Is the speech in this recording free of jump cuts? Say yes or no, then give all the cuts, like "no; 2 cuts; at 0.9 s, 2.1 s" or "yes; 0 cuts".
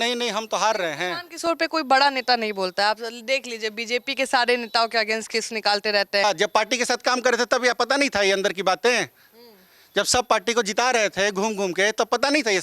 no; 1 cut; at 6.2 s